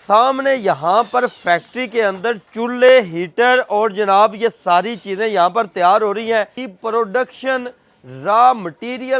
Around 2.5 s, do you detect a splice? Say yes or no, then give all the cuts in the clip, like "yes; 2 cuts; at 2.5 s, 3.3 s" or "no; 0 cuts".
yes; 2 cuts; at 2.5 s, 6.6 s